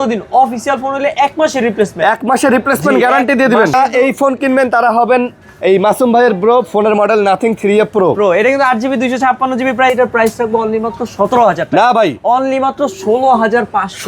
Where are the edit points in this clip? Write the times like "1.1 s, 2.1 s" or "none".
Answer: 3.7 s, 9.9 s